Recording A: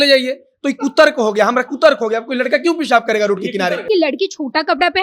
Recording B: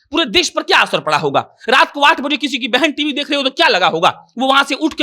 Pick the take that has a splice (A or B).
A